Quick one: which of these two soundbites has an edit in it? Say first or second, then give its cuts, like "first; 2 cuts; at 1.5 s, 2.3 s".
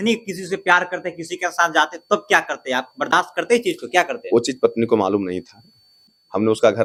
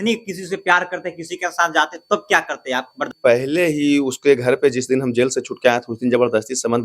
second; 1 cut; at 3.1 s